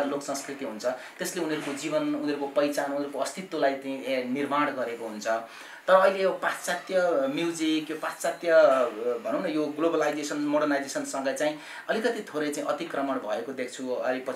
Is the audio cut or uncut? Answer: uncut